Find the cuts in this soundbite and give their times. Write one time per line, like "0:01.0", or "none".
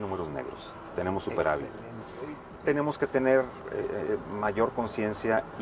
0:02.5

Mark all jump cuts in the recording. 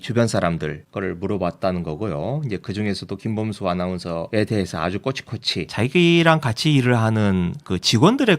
0:04.3
0:05.7

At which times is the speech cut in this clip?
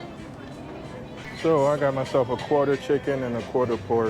0:01.3

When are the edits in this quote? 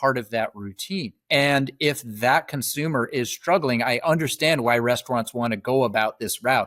none

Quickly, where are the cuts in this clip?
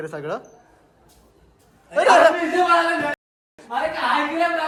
none

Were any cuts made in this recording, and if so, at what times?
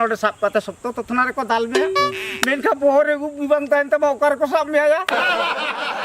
0:05.1

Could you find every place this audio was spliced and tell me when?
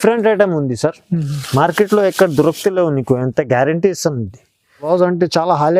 0:04.9

